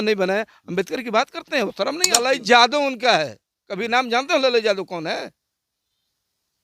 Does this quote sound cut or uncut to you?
cut